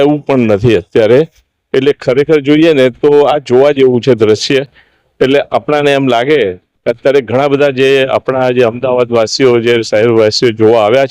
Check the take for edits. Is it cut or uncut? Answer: uncut